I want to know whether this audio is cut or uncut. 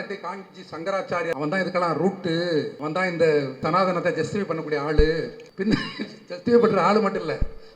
cut